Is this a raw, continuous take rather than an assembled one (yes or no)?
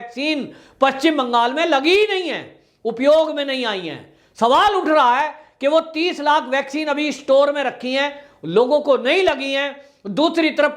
yes